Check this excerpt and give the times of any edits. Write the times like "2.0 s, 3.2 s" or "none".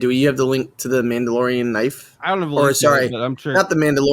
none